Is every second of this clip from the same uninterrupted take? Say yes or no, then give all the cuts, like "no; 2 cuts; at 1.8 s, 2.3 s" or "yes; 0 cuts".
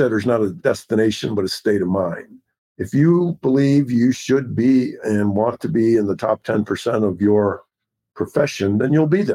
yes; 0 cuts